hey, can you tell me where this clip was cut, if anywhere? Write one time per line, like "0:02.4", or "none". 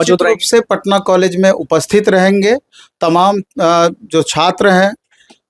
none